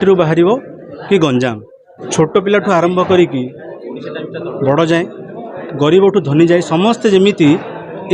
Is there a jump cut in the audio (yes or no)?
yes